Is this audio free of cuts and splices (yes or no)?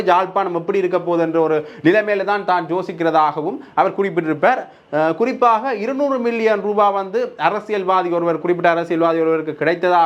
yes